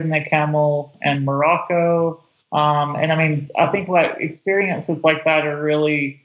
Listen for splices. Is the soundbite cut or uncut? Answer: uncut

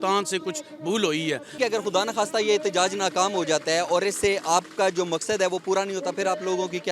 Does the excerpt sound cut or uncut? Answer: cut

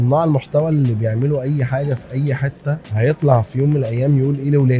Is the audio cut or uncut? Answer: cut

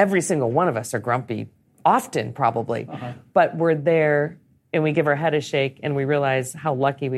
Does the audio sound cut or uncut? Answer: uncut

